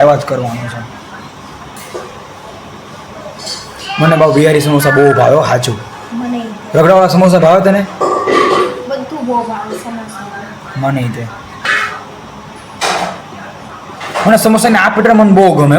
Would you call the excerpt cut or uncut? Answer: cut